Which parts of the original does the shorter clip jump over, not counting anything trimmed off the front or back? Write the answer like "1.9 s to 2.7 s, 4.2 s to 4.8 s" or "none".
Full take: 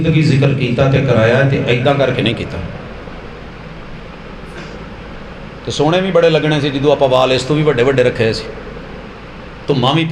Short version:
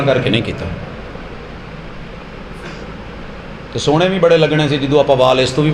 none